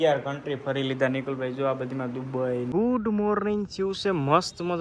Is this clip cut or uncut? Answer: cut